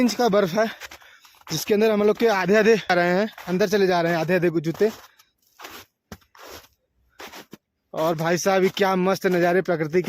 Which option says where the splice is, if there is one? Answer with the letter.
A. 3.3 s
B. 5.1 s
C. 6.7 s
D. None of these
A